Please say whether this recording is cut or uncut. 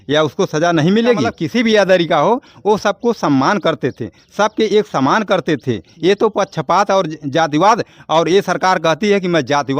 cut